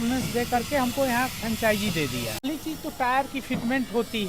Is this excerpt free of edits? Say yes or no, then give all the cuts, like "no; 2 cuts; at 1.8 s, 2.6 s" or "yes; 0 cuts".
no; 1 cut; at 2.5 s